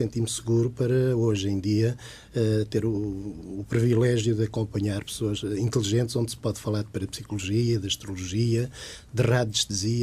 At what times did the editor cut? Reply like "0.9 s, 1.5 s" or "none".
3.4 s